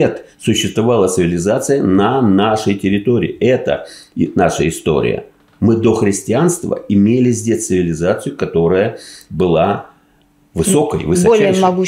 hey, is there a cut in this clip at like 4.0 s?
no; 0 cuts

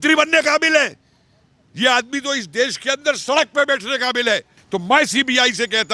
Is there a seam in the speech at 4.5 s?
yes; 1 cut; at 4.5 s

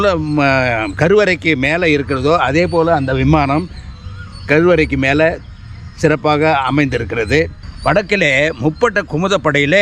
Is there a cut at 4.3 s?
no; 1 cut; at 7.6 s

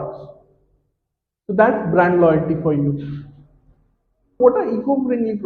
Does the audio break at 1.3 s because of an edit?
no; 1 cut; at 4.2 s

